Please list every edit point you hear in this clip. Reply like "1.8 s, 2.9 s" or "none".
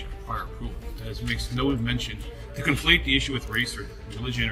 none